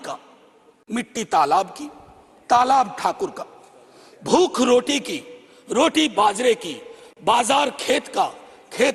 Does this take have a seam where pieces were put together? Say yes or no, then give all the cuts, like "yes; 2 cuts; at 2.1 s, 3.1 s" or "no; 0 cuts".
no; 0 cuts